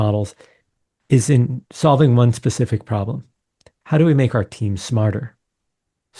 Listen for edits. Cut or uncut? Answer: uncut